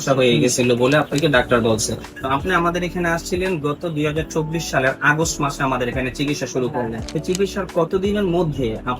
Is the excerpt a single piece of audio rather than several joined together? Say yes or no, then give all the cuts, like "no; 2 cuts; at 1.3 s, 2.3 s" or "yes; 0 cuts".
no; 2 cuts; at 2.1 s, 7.1 s